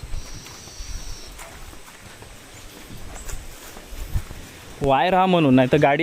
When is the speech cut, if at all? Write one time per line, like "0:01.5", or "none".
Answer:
none